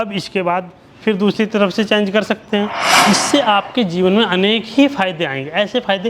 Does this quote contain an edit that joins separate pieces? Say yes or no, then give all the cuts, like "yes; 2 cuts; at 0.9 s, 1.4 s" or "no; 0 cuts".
yes; 1 cut; at 2.9 s